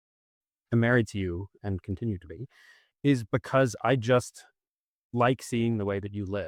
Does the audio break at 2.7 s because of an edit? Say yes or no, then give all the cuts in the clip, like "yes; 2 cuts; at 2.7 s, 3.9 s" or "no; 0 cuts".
no; 0 cuts